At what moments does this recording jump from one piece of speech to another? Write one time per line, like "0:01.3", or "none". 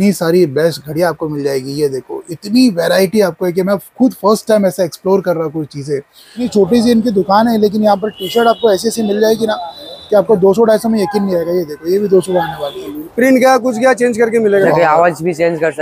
0:06.5
0:13.3
0:14.7